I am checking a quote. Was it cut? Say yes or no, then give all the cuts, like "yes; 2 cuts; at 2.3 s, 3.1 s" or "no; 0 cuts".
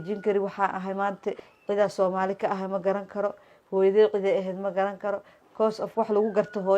yes; 1 cut; at 1.5 s